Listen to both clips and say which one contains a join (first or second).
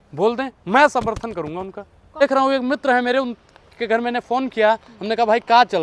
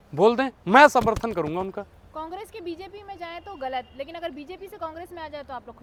first